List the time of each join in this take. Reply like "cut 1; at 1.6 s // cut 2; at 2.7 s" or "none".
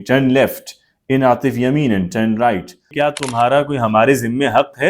cut 1; at 2.9 s